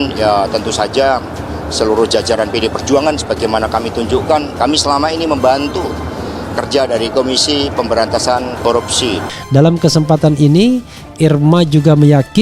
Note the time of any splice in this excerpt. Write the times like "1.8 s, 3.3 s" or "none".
9.4 s